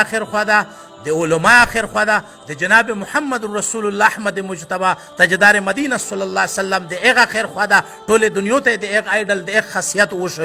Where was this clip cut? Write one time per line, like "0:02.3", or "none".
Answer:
none